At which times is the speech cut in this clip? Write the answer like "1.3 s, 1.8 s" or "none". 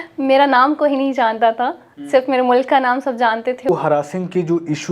3.7 s